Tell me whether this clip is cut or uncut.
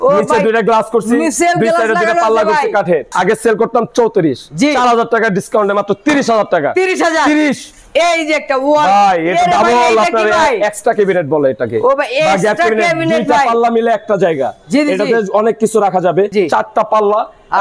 uncut